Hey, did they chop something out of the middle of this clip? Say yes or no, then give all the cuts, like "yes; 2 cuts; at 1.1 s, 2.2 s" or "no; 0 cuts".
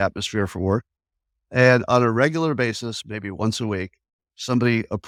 no; 0 cuts